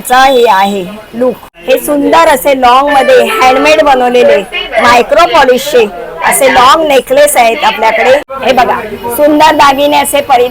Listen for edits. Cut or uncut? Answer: cut